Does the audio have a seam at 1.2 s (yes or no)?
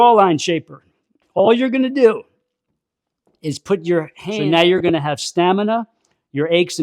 no